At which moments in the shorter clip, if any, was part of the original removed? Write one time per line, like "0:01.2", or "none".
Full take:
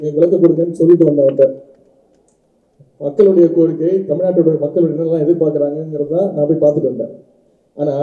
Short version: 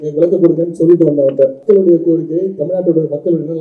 0:01.6